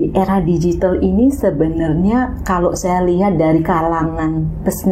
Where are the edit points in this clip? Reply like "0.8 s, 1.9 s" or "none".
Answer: none